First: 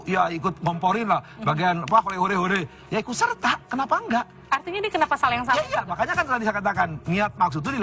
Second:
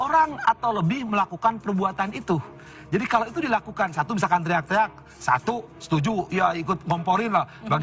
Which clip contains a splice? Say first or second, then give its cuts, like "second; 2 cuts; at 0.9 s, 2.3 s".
first; 1 cut; at 3.6 s